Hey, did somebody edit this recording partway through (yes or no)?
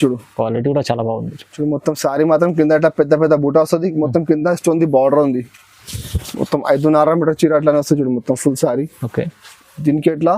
no